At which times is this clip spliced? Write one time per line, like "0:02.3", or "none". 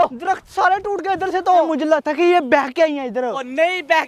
0:01.7

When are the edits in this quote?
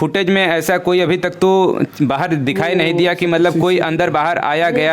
none

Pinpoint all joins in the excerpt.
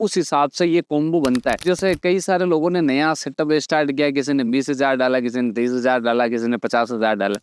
none

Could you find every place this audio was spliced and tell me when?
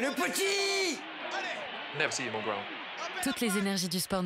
0:03.2

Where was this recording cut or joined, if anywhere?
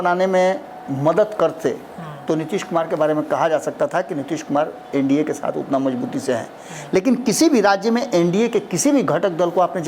none

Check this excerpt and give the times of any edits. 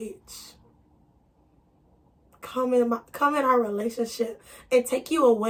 none

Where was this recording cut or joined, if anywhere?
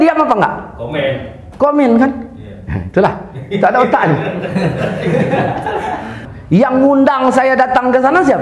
0:06.3

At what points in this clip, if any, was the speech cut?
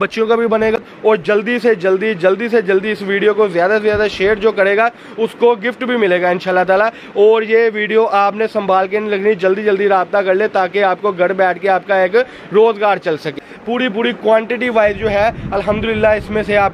0:00.8
0:13.5

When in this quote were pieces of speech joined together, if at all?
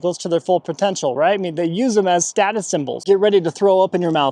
0:03.0

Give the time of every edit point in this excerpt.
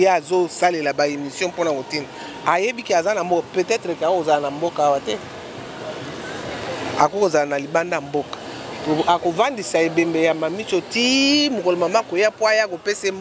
none

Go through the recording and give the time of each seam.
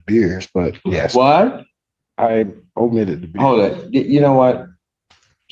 none

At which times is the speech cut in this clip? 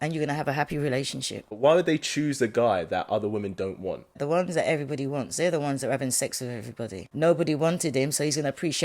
0:01.6
0:04.2
0:07.0

